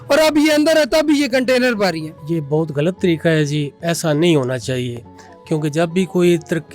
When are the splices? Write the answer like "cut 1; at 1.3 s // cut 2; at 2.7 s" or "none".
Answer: cut 1; at 2.1 s